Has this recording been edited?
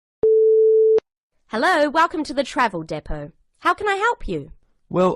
yes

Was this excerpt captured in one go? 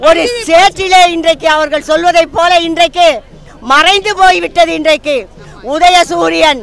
yes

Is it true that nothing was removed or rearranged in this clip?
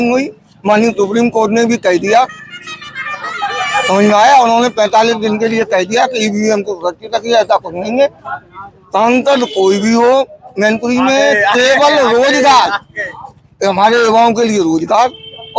yes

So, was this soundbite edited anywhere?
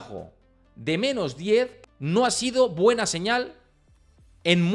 yes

